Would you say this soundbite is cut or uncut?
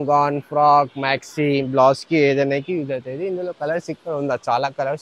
uncut